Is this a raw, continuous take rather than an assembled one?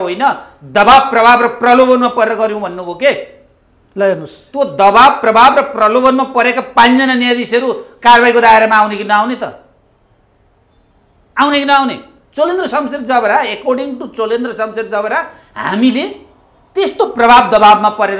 yes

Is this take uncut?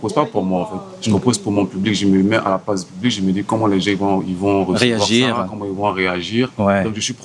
yes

